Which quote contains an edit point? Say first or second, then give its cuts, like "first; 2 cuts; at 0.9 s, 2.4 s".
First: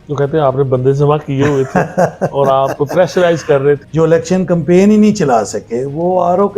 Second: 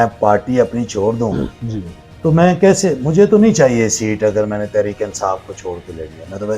first; 1 cut; at 3.8 s